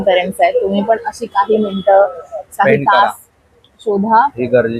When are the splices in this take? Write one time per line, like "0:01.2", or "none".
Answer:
none